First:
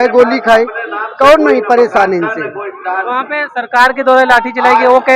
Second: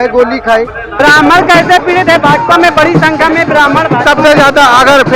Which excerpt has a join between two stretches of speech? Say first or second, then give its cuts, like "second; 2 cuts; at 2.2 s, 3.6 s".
second; 1 cut; at 0.9 s